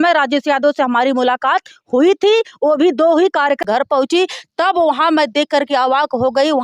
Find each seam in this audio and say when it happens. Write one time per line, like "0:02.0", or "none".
0:03.6